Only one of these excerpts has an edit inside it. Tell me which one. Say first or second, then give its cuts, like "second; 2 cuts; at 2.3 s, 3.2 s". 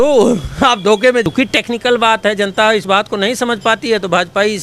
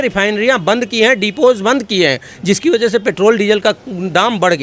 first; 1 cut; at 1.3 s